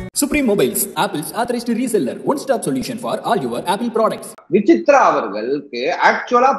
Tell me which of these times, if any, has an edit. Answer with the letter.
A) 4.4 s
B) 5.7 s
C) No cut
A